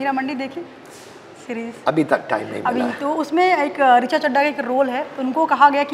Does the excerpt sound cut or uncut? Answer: uncut